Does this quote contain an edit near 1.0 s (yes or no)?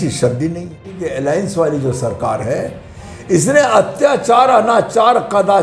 yes